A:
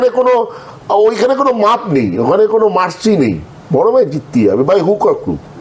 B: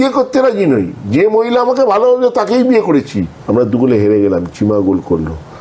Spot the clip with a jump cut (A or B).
B